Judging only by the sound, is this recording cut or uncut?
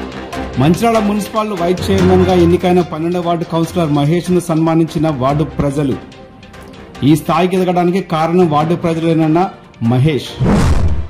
uncut